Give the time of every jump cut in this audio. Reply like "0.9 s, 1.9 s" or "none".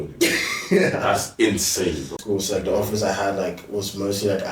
2.2 s